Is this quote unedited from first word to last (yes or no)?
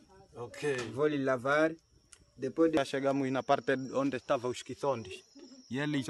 no